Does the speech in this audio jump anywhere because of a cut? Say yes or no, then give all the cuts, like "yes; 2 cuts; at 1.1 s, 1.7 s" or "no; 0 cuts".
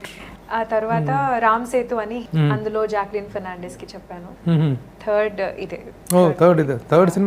yes; 1 cut; at 2.2 s